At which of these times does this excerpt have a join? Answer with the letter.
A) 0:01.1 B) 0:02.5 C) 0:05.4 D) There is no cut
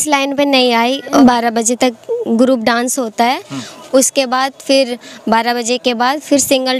A